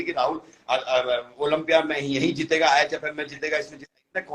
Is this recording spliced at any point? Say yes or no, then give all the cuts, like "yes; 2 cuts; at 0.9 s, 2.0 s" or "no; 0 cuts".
no; 0 cuts